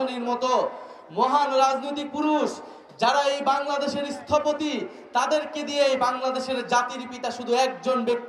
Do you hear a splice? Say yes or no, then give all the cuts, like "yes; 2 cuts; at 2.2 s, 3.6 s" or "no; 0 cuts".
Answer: no; 0 cuts